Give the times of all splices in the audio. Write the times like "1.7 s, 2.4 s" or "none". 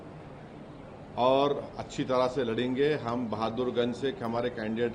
none